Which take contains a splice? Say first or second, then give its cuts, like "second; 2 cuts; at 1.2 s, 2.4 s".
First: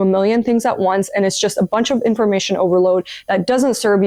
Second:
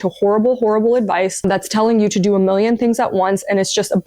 second; 1 cut; at 1.4 s